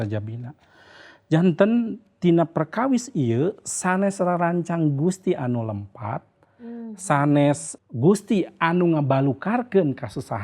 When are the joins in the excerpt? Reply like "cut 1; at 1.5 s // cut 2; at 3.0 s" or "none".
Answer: cut 1; at 7.7 s